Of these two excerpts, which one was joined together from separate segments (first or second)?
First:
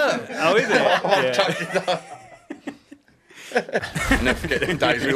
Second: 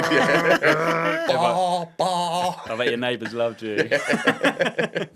first